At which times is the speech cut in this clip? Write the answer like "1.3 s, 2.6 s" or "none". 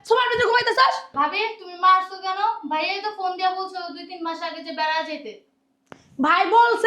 1.1 s